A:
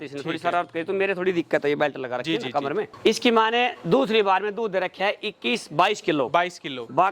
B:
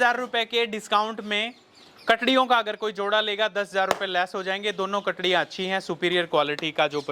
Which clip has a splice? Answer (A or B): A